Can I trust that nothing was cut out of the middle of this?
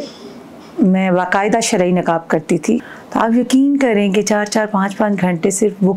no; 1 cut; at 2.8 s

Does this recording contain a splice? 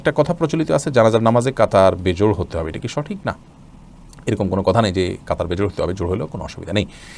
no; 0 cuts

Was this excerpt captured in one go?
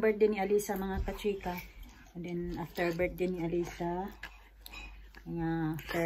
yes; 0 cuts

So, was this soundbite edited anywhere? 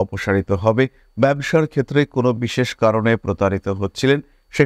no; 0 cuts

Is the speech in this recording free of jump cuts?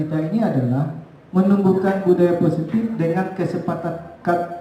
yes; 0 cuts

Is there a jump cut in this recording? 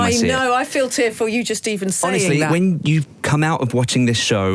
yes; 1 cut; at 2.5 s

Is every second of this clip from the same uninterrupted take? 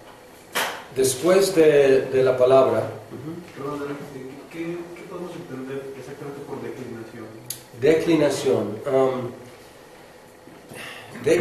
yes; 0 cuts

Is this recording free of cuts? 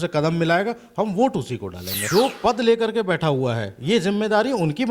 no; 1 cut; at 2.0 s

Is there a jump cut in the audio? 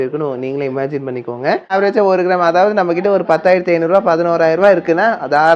yes; 1 cut; at 1.7 s

